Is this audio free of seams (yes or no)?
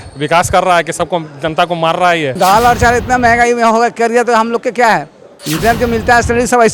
no